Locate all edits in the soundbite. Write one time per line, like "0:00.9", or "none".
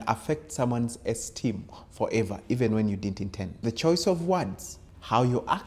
0:03.5